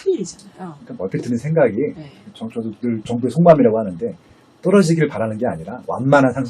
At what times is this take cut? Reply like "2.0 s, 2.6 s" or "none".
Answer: none